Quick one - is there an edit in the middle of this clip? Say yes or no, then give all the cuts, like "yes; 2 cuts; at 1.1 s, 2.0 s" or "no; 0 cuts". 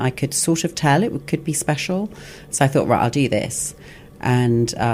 no; 0 cuts